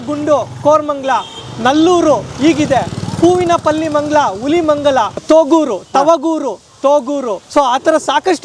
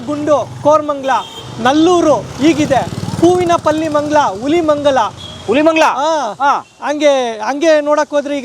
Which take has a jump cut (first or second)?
first